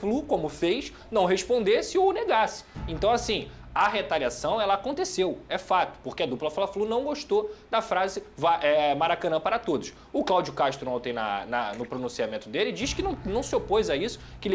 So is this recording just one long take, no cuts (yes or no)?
yes